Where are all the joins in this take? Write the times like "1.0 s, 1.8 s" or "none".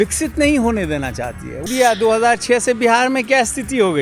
1.6 s